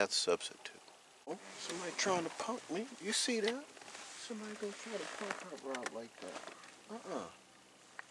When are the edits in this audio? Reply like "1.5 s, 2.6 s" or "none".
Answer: 1.3 s